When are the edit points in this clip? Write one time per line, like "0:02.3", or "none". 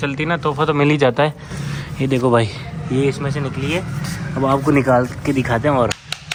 none